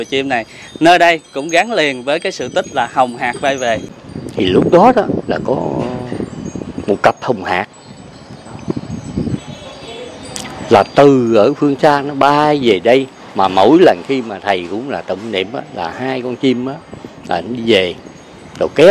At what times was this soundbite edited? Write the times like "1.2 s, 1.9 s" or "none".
3.9 s